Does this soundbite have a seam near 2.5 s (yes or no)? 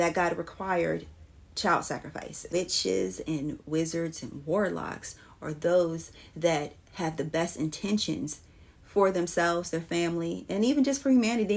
yes